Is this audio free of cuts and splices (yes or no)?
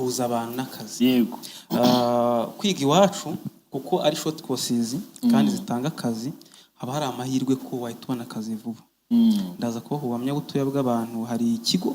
yes